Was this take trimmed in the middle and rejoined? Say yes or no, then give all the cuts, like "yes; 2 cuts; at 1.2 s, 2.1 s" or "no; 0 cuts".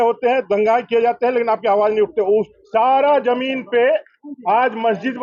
yes; 1 cut; at 2.6 s